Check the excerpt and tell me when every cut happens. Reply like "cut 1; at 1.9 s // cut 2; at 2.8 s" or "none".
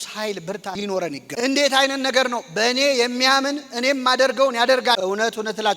cut 1; at 1.3 s